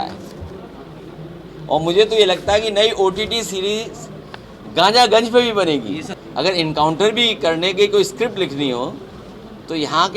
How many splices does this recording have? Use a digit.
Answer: 1